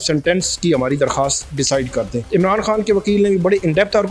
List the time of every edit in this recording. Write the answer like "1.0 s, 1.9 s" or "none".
2.2 s